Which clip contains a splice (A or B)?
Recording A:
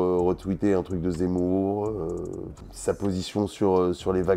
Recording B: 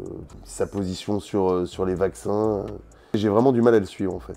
B